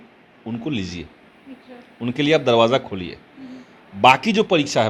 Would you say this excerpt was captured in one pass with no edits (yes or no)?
yes